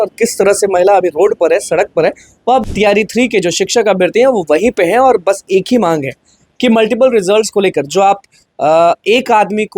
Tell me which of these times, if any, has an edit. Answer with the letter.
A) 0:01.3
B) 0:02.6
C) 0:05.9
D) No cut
B